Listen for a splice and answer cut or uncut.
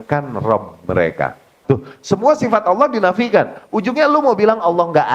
cut